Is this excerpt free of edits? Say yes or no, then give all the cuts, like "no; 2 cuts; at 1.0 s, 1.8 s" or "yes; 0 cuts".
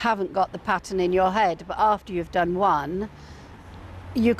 yes; 0 cuts